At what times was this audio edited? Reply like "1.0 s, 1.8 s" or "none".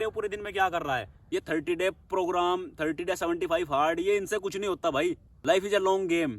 1.1 s, 5.3 s